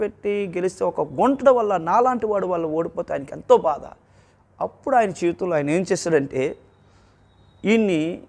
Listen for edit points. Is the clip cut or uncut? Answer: uncut